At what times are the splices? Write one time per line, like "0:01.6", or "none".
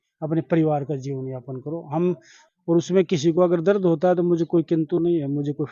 0:02.3